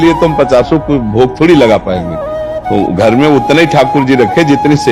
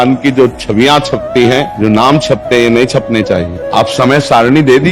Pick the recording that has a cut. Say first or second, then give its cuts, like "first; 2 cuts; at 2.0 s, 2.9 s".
second; 2 cuts; at 1.7 s, 3.6 s